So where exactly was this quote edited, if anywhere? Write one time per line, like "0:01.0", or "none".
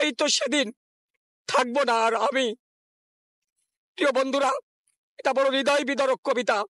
none